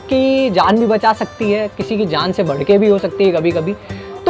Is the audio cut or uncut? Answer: uncut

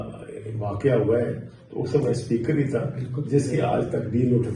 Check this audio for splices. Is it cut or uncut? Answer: uncut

